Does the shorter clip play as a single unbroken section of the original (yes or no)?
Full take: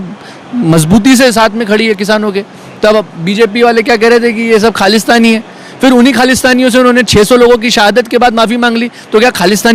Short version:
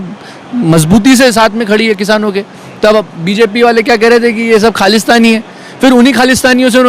yes